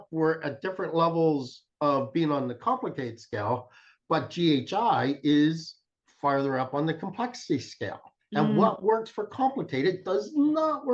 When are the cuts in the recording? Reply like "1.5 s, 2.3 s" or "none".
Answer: none